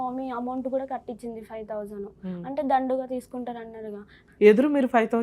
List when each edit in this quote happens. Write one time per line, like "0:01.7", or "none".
0:04.2